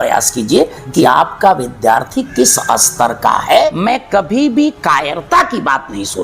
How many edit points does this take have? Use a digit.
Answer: 1